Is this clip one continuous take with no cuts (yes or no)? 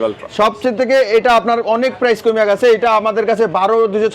yes